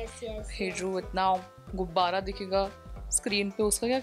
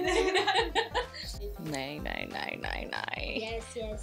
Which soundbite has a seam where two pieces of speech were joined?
second; 1 cut; at 1.5 s

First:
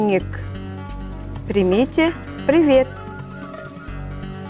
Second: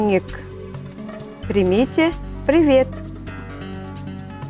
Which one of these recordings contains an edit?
second; 1 cut; at 3.0 s

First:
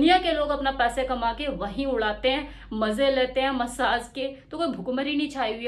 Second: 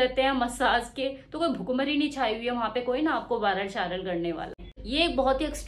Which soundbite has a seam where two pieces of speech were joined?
second; 1 cut; at 4.5 s

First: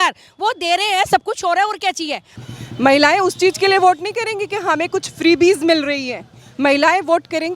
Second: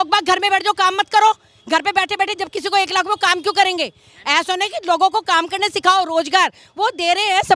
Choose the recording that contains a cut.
first; 1 cut; at 2.3 s

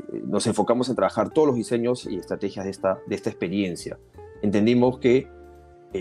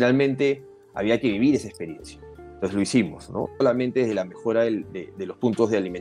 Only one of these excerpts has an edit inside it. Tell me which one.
second; 1 cut; at 3.6 s

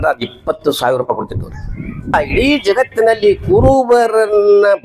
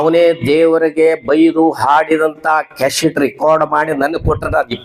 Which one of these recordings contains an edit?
first; 1 cut; at 2.1 s

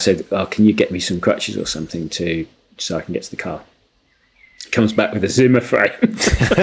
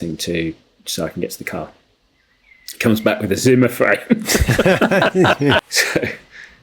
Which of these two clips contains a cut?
second; 1 cut; at 5.7 s

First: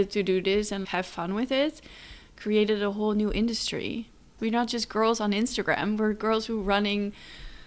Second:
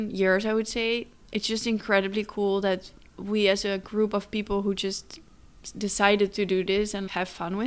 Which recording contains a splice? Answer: first; 1 cut; at 4.4 s

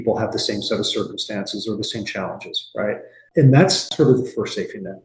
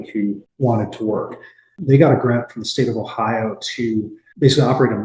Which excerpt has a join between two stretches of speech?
second; 1 cut; at 1.7 s

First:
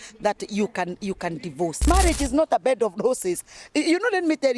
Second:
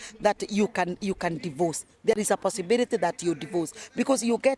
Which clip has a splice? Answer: first; 1 cut; at 1.8 s

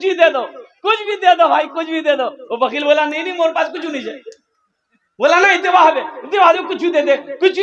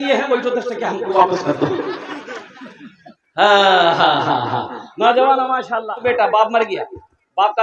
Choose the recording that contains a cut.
second; 1 cut; at 6.0 s

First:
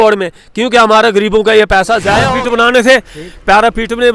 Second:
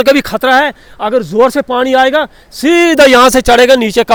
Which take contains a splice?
first; 1 cut; at 2.2 s

